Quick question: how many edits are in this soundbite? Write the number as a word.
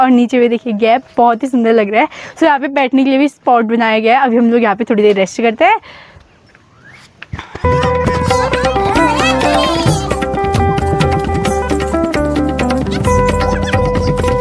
zero